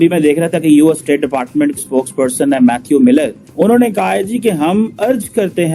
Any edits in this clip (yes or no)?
no